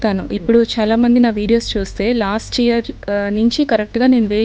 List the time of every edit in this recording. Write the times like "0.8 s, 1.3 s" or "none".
none